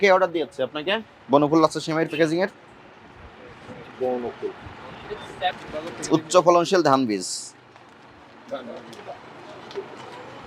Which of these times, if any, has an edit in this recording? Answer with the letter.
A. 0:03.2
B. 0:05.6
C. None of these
B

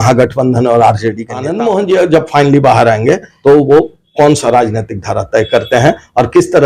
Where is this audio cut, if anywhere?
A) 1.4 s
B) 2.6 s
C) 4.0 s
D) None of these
A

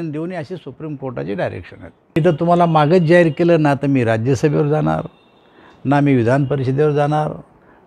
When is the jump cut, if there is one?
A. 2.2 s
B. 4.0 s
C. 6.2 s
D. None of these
A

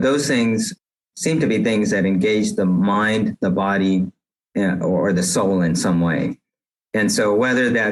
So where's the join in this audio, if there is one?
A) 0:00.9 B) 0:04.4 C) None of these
A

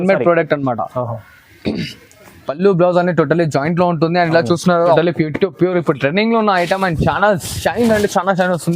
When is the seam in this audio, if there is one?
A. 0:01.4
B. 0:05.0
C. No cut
B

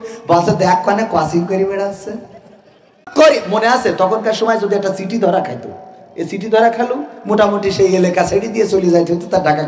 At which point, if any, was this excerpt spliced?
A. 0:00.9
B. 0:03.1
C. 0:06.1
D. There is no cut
B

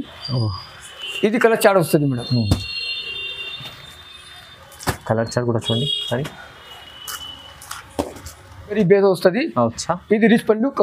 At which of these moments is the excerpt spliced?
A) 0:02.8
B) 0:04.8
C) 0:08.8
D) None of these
C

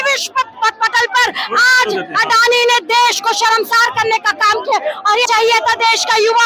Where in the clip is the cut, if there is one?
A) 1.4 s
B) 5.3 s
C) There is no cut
B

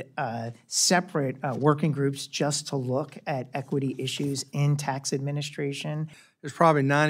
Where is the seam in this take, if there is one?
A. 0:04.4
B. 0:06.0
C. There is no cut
B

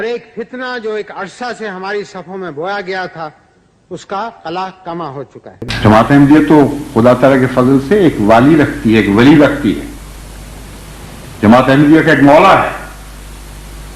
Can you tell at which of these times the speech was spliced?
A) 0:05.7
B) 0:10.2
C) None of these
A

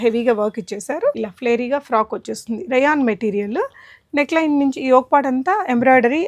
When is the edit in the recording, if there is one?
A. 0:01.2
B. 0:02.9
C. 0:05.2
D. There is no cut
A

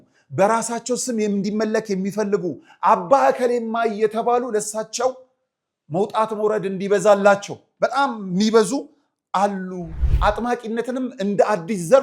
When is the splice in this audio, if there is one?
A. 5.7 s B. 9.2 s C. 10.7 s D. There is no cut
D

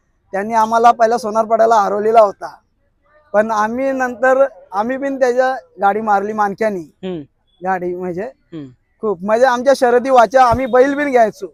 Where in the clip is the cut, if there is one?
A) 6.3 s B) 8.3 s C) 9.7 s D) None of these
D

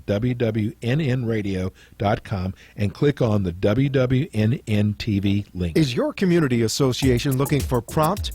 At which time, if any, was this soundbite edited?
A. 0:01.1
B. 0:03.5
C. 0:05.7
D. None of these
C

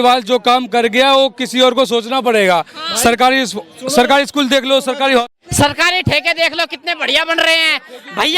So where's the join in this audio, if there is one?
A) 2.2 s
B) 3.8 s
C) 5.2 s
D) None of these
C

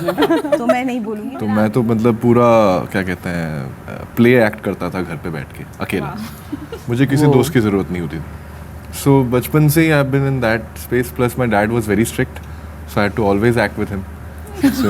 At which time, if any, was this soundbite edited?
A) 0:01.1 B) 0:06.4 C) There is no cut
A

